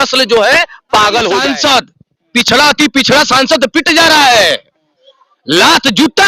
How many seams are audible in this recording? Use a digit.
1